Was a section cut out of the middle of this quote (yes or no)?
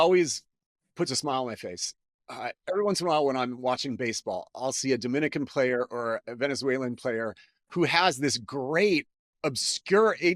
no